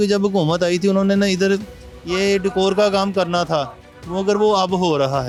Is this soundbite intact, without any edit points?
yes; 0 cuts

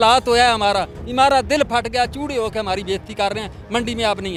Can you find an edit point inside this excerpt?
no; 0 cuts

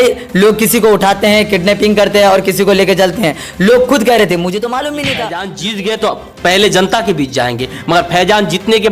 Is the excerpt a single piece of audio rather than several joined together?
no; 1 cut; at 5.5 s

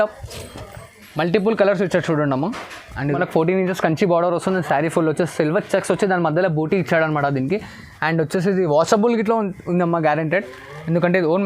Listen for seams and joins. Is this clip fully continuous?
no; 1 cut; at 3.1 s

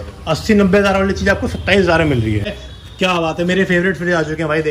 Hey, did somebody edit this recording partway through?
yes; 1 cut; at 2.5 s

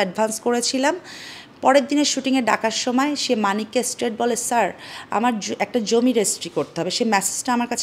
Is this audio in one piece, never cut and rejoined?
yes; 0 cuts

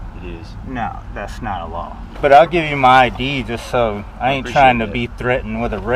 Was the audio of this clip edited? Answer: yes; 1 cut; at 2.0 s

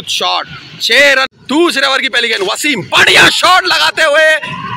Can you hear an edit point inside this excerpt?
yes; 1 cut; at 1.2 s

